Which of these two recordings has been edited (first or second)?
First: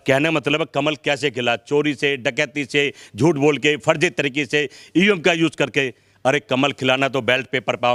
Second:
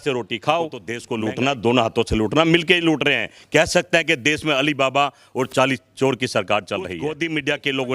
second